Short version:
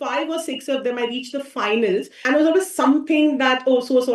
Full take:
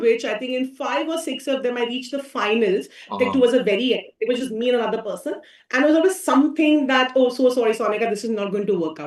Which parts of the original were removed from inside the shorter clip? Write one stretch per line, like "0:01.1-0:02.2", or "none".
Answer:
0:02.9-0:05.6